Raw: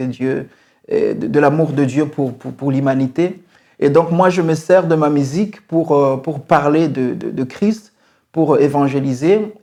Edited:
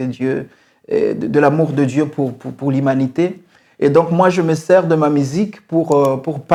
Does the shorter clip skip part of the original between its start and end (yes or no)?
no